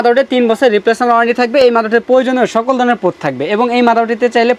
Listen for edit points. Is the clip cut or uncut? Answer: uncut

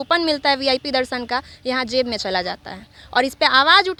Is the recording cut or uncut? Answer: uncut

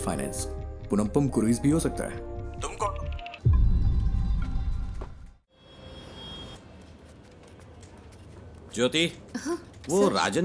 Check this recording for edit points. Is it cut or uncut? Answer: cut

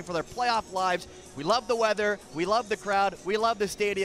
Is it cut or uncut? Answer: uncut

